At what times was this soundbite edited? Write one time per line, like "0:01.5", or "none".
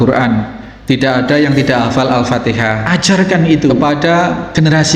0:02.8
0:03.8